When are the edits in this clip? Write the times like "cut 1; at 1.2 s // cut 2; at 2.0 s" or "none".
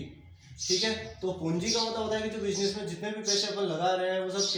none